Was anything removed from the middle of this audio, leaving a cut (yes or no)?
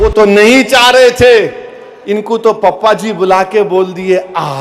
no